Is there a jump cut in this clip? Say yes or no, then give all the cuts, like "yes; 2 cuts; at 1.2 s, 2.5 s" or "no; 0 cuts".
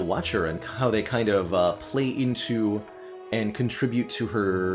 no; 0 cuts